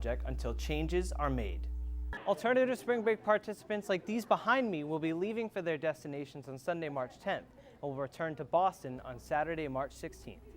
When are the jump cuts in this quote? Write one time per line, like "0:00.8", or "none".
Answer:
0:02.1